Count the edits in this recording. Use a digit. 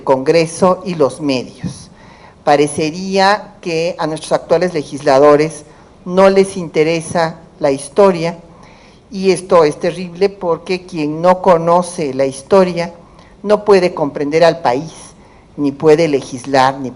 1